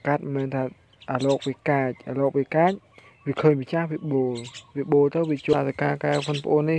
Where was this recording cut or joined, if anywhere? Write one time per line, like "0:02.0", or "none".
0:05.5

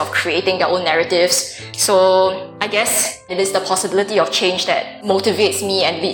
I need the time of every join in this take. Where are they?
0:01.7
0:02.8
0:04.9

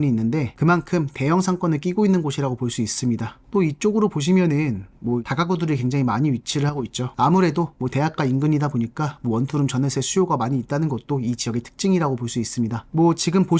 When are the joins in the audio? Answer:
none

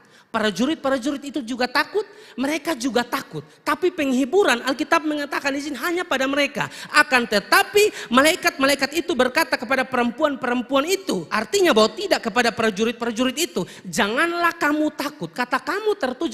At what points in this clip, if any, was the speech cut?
0:11.3

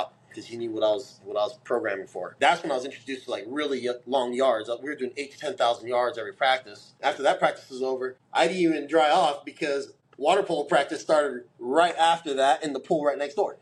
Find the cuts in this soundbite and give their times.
none

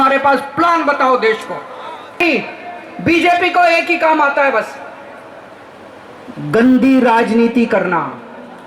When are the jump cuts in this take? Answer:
0:02.2

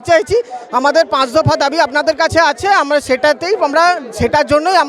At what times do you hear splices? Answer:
none

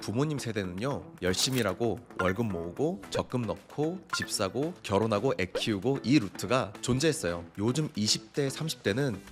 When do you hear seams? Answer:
0:01.1
0:07.5

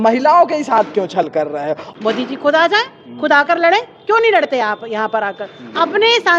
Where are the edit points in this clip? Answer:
0:01.9

